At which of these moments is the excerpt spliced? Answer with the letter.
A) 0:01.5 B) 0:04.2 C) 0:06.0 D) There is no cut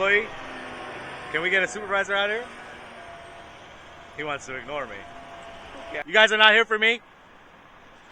C